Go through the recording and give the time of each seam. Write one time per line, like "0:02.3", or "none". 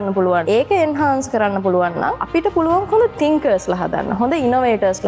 none